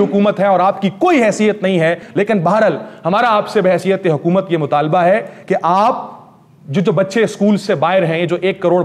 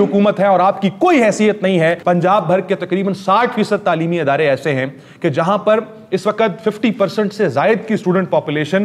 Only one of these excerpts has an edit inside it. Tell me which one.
second; 1 cut; at 2.0 s

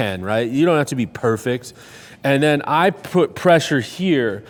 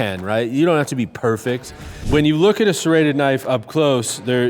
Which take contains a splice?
second; 1 cut; at 2.0 s

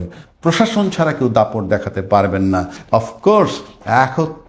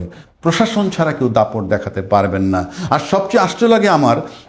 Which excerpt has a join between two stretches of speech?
first; 1 cut; at 2.7 s

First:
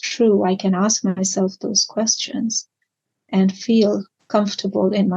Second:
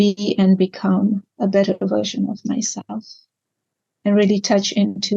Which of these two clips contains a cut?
second; 1 cut; at 1.3 s

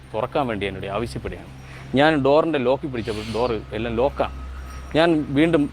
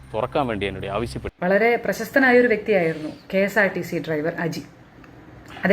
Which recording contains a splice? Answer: second; 1 cut; at 1.2 s

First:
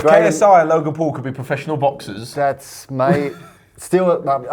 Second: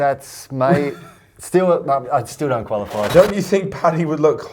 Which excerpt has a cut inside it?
second; 1 cut; at 3.1 s

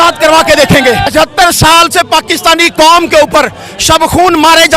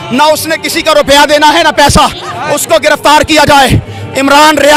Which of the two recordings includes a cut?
first; 1 cut; at 1.0 s

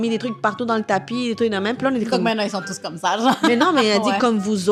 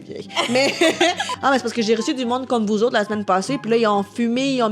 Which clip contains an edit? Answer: second; 1 cut; at 1.3 s

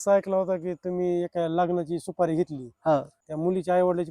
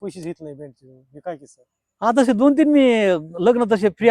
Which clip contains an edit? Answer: first; 1 cut; at 3.2 s

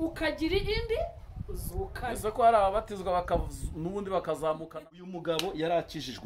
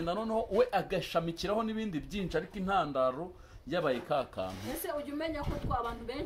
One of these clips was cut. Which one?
first; 1 cut; at 5.1 s

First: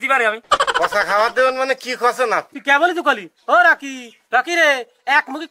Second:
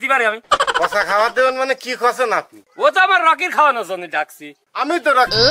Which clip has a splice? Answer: first; 1 cut; at 2.5 s

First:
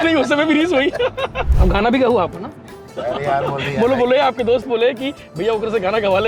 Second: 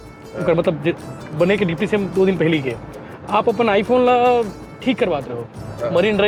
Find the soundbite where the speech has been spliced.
first; 1 cut; at 1.5 s

